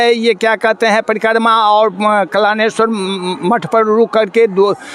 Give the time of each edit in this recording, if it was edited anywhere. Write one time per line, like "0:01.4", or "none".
none